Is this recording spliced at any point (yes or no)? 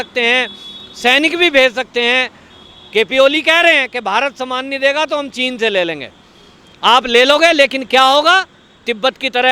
no